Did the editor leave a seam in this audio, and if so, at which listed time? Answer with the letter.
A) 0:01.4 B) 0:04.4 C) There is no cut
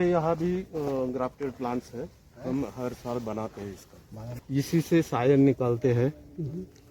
B